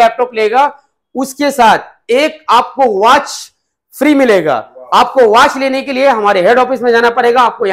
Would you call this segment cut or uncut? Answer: uncut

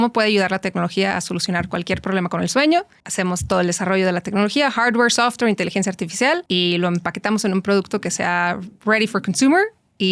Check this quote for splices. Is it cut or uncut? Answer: cut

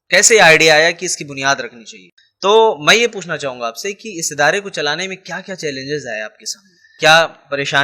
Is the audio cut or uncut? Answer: cut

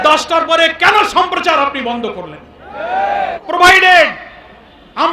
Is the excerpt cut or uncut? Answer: cut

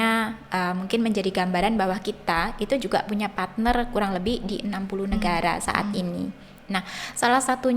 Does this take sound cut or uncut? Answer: uncut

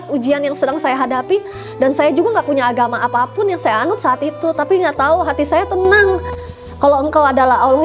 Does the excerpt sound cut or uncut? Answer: cut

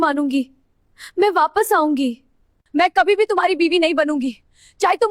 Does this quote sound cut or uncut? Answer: cut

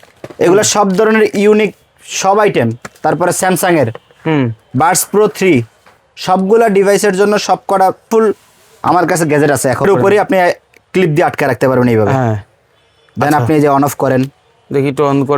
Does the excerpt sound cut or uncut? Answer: cut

